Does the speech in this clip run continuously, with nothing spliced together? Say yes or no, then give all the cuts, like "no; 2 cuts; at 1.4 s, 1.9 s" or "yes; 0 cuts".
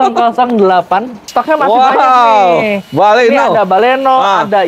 no; 1 cut; at 1.2 s